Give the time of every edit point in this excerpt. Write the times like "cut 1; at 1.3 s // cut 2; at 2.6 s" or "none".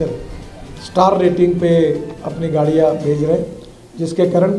none